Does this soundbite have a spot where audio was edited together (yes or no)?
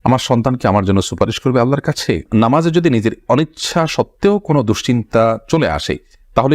yes